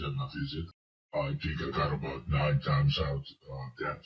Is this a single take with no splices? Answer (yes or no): no